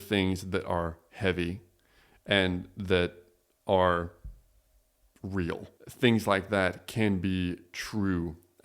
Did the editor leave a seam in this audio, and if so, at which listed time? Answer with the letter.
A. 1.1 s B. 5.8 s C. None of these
B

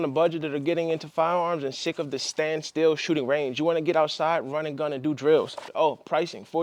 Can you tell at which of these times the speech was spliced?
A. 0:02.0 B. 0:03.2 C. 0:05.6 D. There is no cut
C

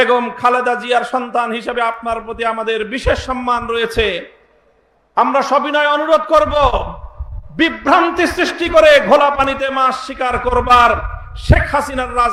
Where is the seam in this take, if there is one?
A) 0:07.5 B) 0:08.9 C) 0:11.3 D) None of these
D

